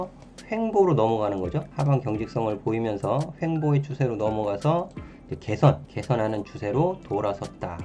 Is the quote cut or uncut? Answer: cut